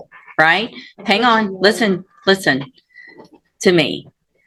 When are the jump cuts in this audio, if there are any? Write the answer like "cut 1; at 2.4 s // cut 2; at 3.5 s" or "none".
none